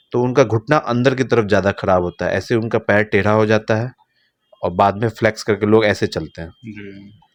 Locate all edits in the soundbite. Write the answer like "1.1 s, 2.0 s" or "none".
none

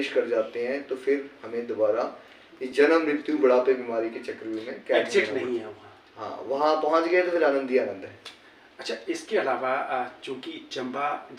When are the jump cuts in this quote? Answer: none

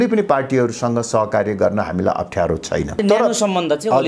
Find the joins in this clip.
3.0 s

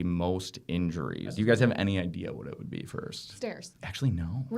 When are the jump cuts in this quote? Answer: 1.3 s, 3.3 s

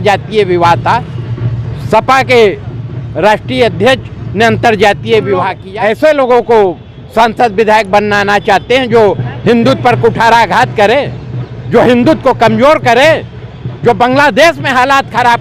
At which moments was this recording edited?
5.6 s

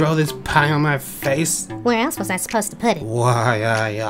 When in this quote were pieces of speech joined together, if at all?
1.6 s, 3.0 s

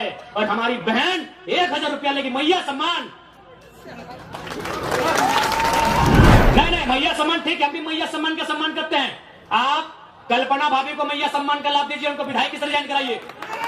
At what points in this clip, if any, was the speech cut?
6.4 s

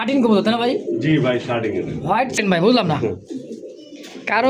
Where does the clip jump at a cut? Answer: 2.4 s

